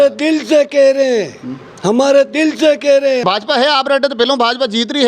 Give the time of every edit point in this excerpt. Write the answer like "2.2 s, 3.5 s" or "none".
3.2 s

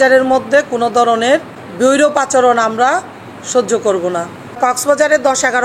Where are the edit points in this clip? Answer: 1.6 s, 4.6 s

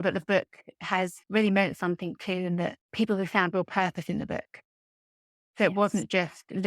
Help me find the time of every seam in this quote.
1.2 s

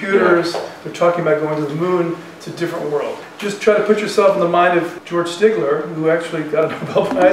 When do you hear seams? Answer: 3.3 s, 4.9 s

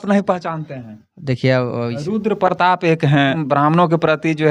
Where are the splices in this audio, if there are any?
1.9 s, 3.4 s

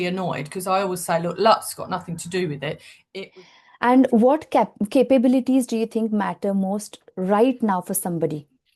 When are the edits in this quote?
3.1 s

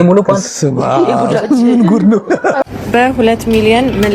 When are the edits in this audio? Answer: 2.6 s

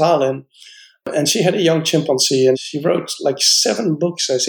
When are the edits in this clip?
2.6 s

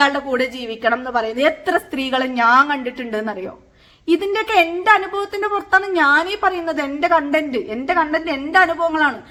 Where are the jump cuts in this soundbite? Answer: none

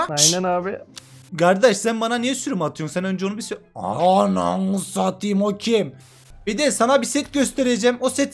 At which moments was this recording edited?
0.9 s, 5.9 s

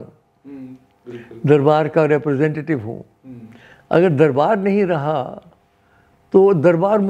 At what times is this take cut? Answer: none

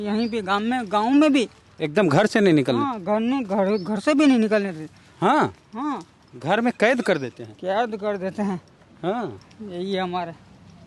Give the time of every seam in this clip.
none

